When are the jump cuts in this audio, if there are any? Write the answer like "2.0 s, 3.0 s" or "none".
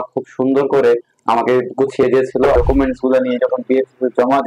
2.5 s

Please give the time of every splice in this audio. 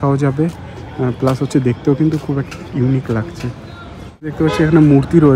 4.3 s

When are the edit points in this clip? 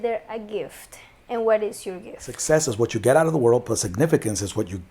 2.3 s

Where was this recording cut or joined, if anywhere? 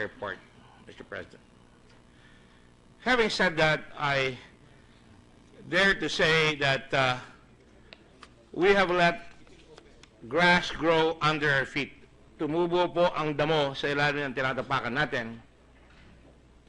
13.2 s

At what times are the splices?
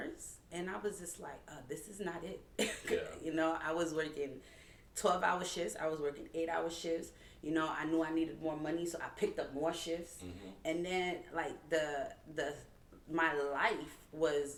none

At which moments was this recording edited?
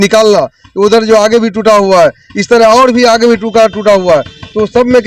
none

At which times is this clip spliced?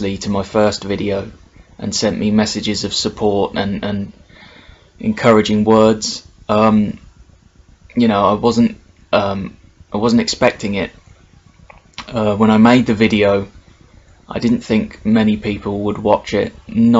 3.3 s

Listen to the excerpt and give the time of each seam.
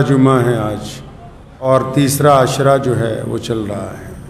1.7 s

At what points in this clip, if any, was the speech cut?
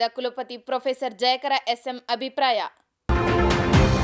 none

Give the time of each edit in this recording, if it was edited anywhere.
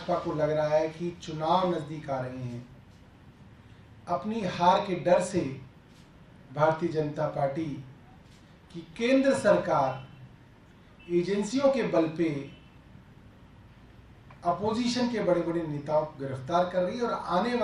none

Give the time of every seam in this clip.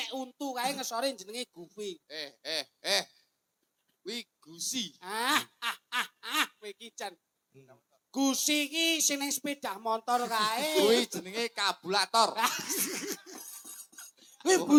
none

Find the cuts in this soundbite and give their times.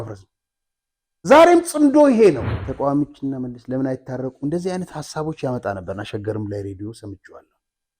2.6 s

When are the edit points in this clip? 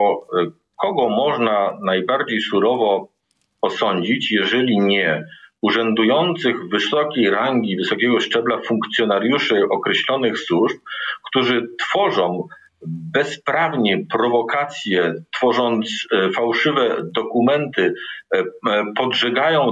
none

